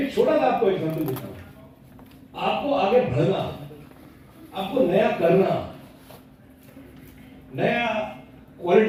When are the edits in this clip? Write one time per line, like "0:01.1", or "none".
none